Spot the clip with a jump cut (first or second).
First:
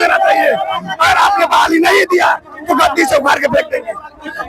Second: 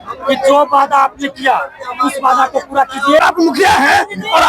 second